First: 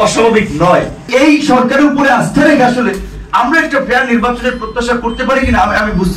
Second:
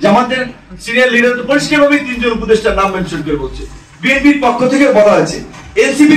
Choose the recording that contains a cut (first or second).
first